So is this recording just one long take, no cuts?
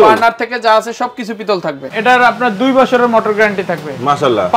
no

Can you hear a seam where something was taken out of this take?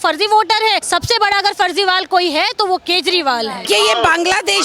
yes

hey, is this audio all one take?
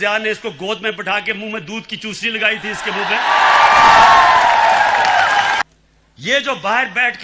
no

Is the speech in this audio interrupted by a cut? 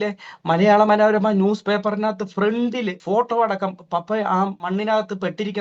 yes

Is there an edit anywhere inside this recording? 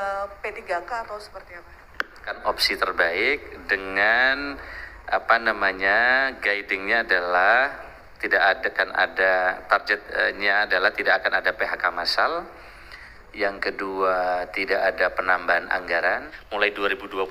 yes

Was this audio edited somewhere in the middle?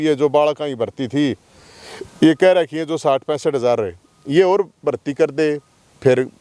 no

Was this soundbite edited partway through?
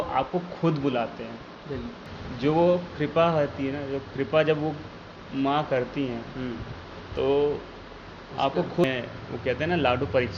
yes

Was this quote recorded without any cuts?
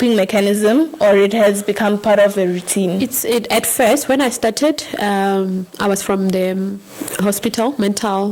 yes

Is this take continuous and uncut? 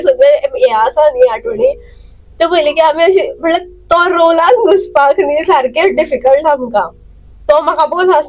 yes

